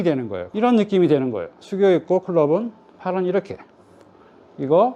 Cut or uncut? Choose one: uncut